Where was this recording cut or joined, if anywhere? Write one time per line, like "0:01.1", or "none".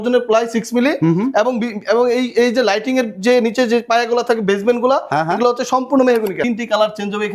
0:06.4